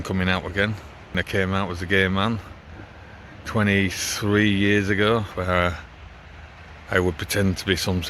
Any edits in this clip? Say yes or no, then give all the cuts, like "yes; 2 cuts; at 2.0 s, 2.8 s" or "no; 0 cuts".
yes; 2 cuts; at 1.2 s, 5.3 s